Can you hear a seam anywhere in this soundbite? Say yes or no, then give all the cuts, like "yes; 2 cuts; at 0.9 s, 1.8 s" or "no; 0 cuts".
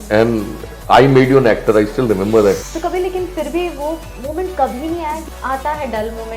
yes; 2 cuts; at 2.7 s, 5.2 s